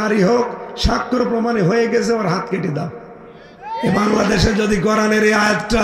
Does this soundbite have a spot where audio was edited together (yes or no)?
no